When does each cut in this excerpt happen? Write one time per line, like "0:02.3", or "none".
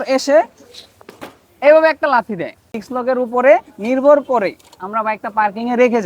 0:02.7